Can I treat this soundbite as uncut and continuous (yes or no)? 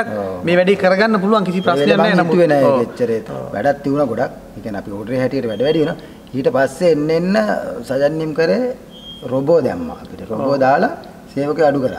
no